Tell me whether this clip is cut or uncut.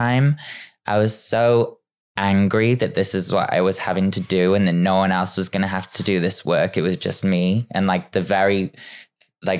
uncut